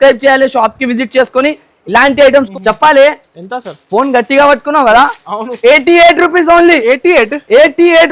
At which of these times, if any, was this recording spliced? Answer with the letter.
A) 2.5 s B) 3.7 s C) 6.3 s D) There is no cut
A